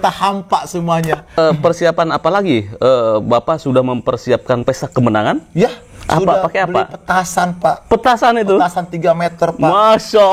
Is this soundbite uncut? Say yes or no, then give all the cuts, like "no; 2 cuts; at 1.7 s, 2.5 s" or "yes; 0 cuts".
no; 1 cut; at 1.4 s